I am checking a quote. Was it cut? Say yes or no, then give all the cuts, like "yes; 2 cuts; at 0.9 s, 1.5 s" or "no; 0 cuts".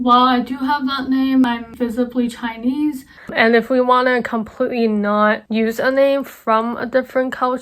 yes; 2 cuts; at 1.7 s, 3.1 s